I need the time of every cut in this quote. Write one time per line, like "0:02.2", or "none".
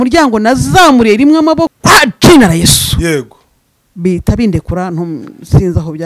0:01.7